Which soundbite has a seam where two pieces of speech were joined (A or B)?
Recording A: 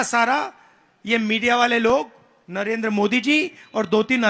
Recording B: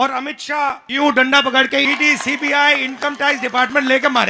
B